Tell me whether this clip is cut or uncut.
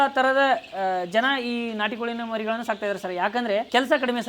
uncut